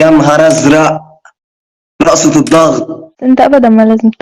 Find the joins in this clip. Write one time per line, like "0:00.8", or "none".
0:03.2